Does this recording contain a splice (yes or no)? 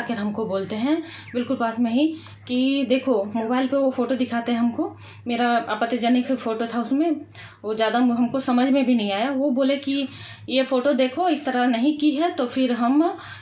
no